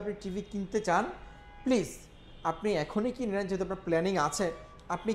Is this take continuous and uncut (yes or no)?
yes